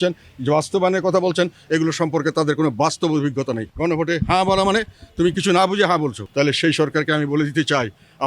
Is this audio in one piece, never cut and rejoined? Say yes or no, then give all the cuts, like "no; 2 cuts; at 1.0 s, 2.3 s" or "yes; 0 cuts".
no; 2 cuts; at 3.7 s, 6.2 s